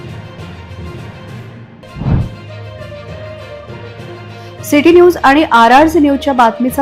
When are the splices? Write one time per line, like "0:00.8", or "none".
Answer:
none